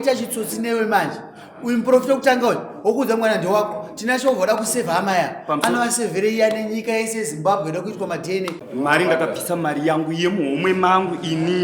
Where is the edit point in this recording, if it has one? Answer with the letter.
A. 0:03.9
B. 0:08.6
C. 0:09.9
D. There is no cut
B